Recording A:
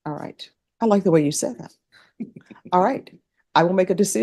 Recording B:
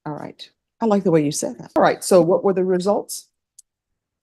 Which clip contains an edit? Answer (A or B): B